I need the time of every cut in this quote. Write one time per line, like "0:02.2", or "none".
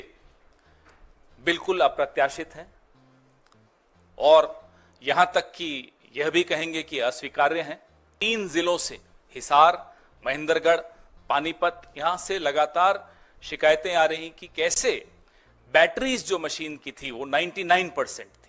0:08.1